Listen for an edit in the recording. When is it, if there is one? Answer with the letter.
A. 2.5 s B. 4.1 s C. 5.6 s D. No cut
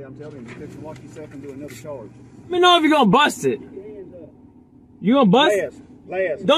A